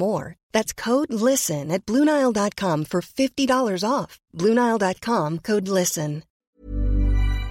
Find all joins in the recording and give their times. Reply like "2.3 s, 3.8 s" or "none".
6.4 s